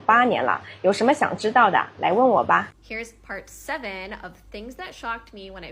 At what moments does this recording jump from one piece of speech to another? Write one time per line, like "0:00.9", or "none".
none